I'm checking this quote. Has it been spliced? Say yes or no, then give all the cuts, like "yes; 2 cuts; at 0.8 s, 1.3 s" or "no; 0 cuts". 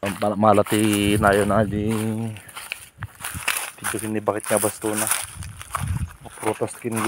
no; 0 cuts